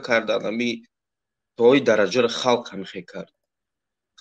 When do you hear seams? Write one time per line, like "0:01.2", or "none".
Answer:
none